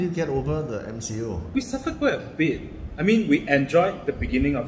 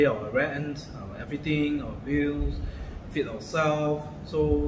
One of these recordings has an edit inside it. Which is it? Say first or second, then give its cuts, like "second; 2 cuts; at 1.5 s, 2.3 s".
first; 1 cut; at 1.5 s